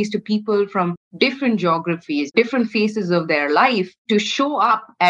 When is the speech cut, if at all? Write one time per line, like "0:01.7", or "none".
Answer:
0:01.0
0:02.3
0:04.0